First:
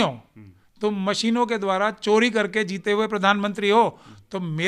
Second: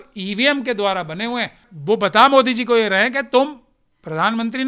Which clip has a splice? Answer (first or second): second